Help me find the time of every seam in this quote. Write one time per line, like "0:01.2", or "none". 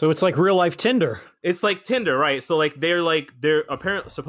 0:01.3